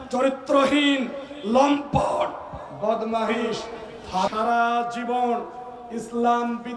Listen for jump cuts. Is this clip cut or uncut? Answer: cut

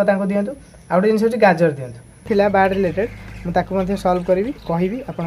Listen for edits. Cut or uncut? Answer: cut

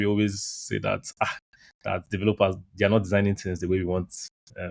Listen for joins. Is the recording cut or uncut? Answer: uncut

